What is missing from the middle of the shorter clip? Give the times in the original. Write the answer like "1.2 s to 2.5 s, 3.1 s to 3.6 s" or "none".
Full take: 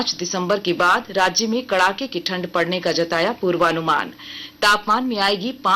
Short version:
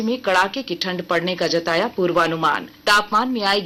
4.1 s to 4.4 s

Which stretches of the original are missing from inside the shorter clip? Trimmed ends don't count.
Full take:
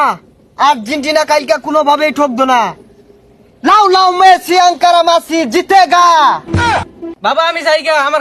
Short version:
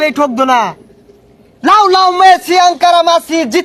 none

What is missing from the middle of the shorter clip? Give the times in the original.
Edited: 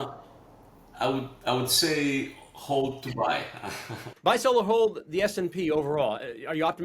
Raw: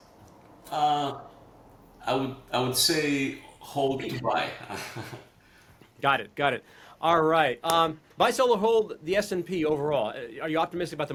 5.2 s to 8.0 s

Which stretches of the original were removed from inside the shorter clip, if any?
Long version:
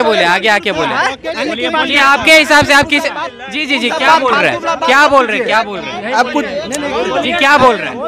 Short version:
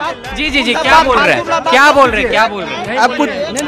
none

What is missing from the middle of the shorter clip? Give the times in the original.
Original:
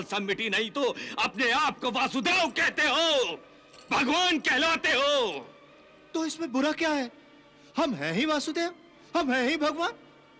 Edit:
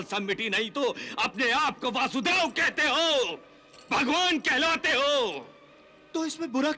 none

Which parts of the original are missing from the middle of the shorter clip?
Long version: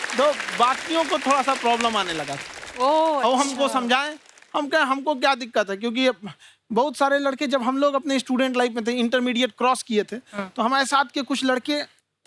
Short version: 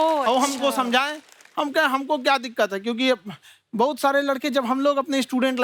none

